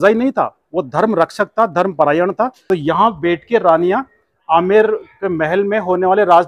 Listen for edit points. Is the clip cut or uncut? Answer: cut